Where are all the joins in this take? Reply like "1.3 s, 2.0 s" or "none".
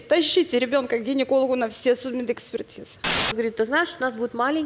3.4 s